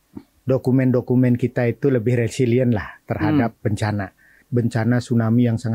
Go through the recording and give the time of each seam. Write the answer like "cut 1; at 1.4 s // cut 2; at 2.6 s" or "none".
cut 1; at 4.5 s